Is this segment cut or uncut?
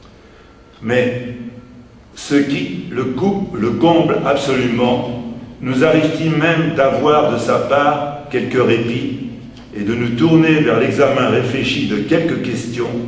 uncut